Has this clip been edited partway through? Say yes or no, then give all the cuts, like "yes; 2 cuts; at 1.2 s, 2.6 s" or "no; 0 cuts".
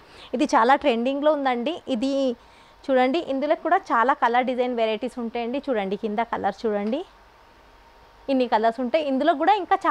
no; 0 cuts